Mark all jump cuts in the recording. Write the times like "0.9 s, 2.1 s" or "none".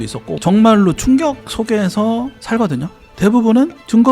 3.1 s